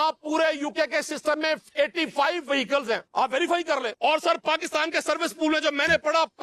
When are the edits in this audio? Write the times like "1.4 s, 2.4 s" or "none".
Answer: 3.1 s, 3.9 s